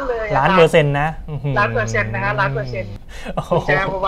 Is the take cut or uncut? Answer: cut